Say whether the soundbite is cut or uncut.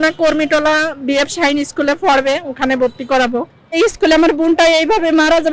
cut